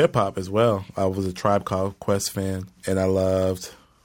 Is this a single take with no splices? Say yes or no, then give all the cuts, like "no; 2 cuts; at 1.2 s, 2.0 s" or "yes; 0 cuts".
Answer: no; 1 cut; at 2.7 s